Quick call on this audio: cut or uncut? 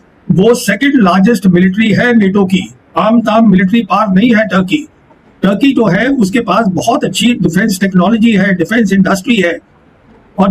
uncut